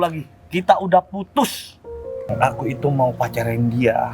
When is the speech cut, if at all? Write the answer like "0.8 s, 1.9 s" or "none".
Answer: 2.1 s